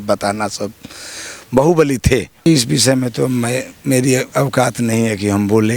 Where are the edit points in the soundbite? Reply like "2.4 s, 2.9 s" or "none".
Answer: 2.5 s